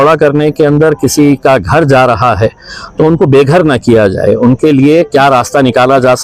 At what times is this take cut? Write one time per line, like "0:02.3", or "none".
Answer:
none